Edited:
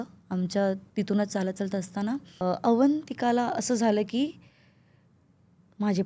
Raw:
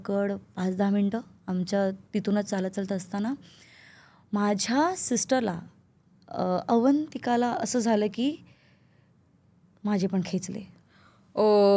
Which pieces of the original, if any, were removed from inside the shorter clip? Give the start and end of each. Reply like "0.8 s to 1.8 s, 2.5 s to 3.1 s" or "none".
3.6 s to 6.5 s